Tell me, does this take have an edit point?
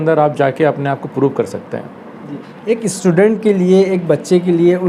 no; 0 cuts

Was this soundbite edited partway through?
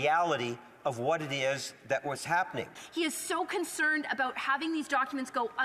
yes; 1 cut; at 2.8 s

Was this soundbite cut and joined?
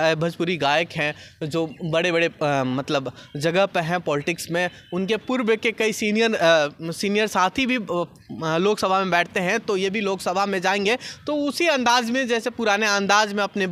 no; 0 cuts

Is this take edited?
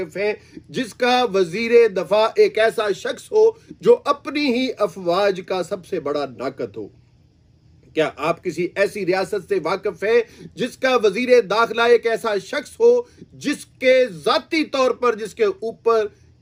no; 0 cuts

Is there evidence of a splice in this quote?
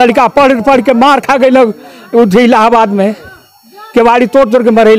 no; 0 cuts

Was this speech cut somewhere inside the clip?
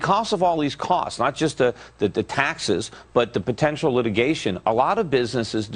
no; 0 cuts

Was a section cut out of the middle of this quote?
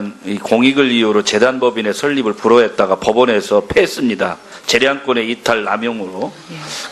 no; 0 cuts

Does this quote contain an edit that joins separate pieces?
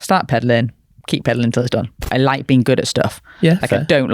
yes; 1 cut; at 2.1 s

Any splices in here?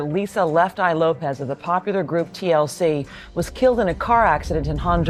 no; 0 cuts

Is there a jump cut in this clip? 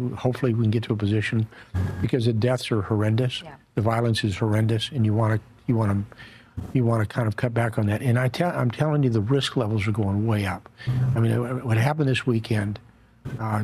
no; 0 cuts

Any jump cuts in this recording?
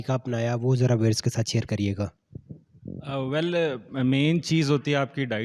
no; 0 cuts

